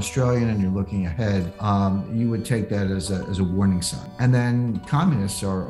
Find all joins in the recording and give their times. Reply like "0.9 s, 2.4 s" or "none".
1.5 s, 4.1 s